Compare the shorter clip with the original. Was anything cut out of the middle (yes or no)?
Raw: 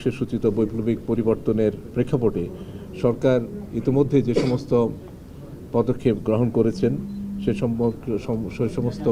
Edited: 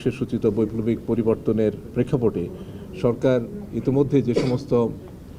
no